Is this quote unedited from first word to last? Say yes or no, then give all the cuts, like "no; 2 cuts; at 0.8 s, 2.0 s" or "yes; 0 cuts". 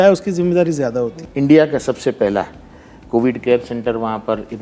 no; 1 cut; at 1.2 s